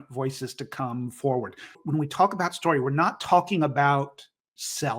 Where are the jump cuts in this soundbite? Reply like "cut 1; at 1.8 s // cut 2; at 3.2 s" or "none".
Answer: cut 1; at 1.8 s